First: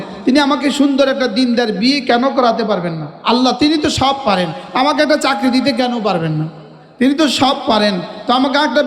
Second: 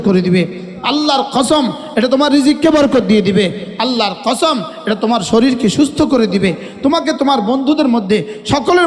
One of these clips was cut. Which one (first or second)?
first